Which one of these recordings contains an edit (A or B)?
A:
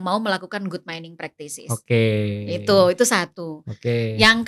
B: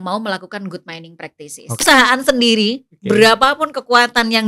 B